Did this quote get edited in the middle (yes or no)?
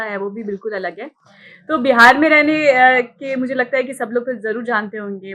no